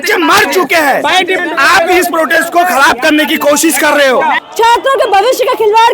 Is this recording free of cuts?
no; 2 cuts; at 1.4 s, 4.4 s

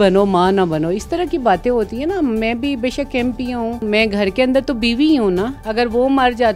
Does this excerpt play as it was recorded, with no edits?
no; 2 cuts; at 3.8 s, 5.6 s

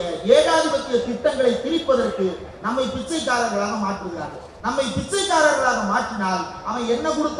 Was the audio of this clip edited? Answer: yes; 1 cut; at 4.4 s

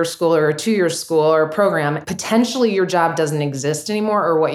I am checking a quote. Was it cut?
yes; 1 cut; at 2.0 s

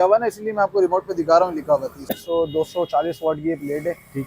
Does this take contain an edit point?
yes; 1 cut; at 2.2 s

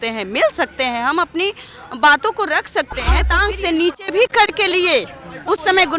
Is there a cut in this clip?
yes; 1 cut; at 3.4 s

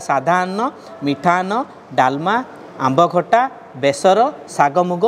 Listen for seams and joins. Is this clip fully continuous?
yes; 0 cuts

